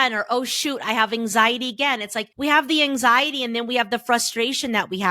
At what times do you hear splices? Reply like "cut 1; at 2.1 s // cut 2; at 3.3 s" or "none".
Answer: cut 1; at 2.2 s